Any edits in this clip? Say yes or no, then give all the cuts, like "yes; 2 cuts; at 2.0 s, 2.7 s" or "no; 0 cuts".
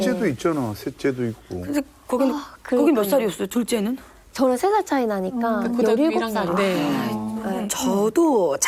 no; 0 cuts